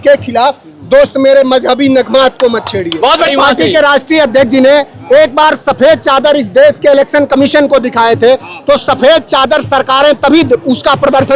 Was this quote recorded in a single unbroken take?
no; 1 cut; at 3.3 s

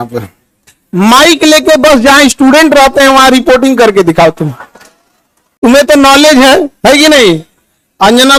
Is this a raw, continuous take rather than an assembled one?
yes; 0 cuts

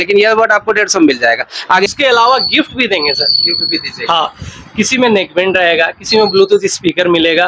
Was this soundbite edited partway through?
yes; 1 cut; at 1.9 s

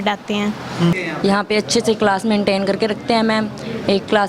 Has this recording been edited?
yes; 1 cut; at 0.9 s

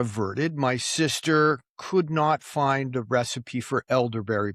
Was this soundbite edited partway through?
no; 0 cuts

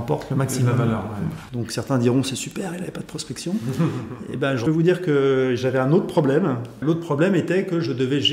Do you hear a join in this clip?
yes; 3 cuts; at 1.4 s, 4.6 s, 6.7 s

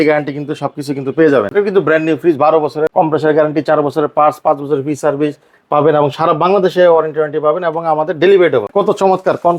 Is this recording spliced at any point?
yes; 3 cuts; at 1.5 s, 2.9 s, 8.7 s

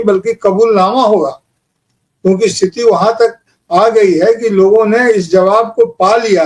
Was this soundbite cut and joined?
no; 0 cuts

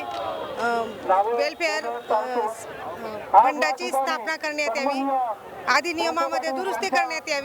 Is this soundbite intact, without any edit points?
yes; 0 cuts

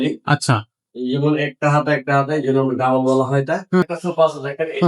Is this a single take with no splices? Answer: no; 1 cut; at 3.8 s

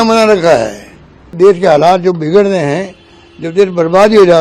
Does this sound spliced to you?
yes; 1 cut; at 1.3 s

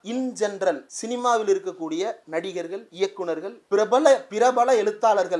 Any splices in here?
yes; 3 cuts; at 0.9 s, 2.9 s, 3.6 s

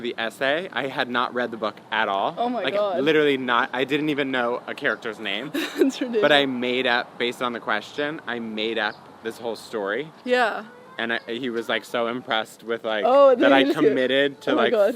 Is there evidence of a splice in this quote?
no; 0 cuts

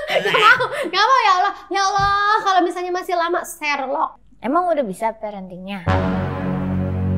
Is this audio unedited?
no; 1 cut; at 4.2 s

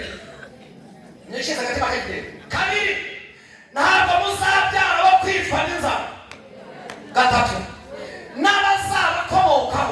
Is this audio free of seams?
no; 1 cut; at 2.4 s

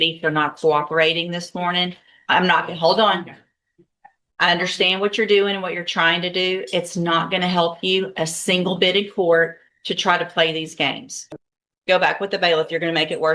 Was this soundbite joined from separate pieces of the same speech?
yes; 1 cut; at 11.1 s

